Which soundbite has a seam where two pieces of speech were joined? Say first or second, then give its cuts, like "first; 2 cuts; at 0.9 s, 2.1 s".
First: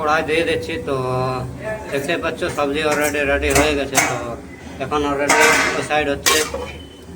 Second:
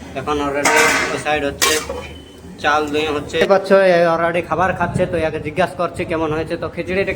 second; 1 cut; at 3.4 s